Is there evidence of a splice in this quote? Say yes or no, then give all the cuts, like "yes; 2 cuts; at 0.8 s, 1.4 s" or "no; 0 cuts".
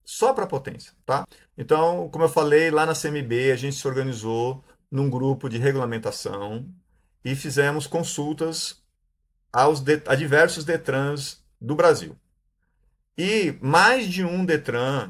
no; 0 cuts